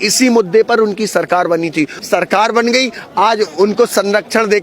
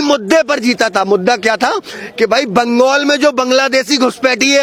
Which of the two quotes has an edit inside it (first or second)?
first